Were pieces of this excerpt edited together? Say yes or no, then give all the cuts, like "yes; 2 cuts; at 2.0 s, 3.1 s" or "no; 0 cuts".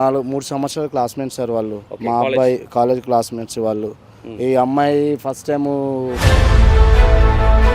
yes; 2 cuts; at 1.9 s, 6.2 s